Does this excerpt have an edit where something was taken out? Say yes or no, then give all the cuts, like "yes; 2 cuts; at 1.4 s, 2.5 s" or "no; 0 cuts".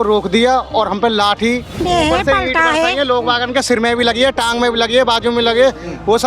yes; 1 cut; at 1.8 s